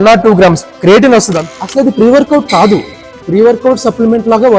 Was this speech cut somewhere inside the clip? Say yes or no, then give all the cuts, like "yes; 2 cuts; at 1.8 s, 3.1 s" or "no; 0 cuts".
yes; 1 cut; at 1.4 s